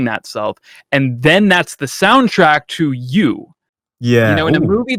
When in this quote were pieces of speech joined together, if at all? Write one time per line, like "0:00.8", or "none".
none